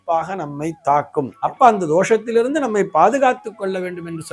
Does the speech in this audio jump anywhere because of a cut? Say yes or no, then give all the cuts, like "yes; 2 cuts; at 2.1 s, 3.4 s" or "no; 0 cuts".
yes; 1 cut; at 1.3 s